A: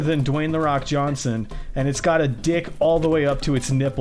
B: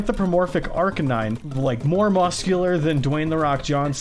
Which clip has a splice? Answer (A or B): B